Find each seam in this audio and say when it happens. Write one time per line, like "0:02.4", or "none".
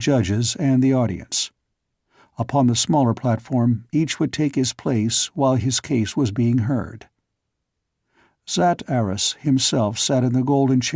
0:09.2